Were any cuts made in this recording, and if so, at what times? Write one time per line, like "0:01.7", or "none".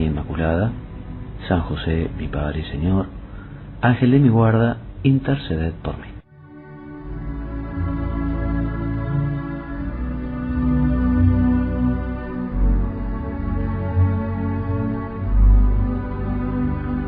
0:07.8